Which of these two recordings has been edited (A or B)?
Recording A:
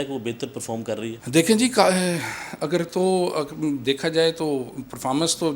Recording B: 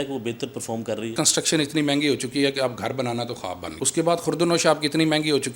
B